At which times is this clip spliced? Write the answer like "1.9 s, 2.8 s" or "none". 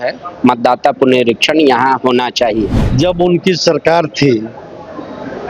2.8 s